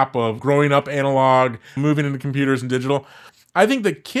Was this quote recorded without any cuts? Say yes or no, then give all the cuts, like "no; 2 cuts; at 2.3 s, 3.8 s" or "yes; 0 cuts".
yes; 0 cuts